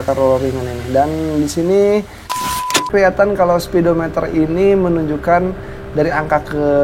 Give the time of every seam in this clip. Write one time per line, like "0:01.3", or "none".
0:02.3